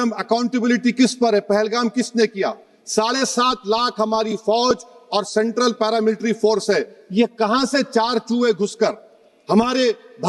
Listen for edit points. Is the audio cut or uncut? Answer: uncut